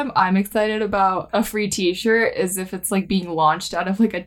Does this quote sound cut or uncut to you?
cut